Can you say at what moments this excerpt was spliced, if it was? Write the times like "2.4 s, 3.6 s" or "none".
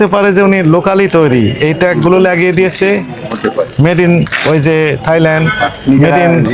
none